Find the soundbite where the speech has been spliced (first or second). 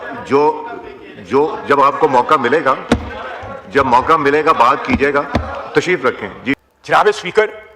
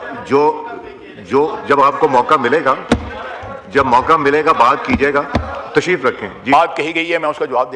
first